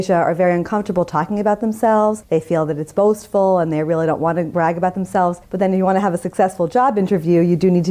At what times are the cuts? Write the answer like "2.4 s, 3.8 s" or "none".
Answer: 2.2 s, 4.5 s, 5.4 s